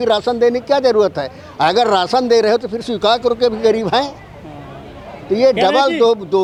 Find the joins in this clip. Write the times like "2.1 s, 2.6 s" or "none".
none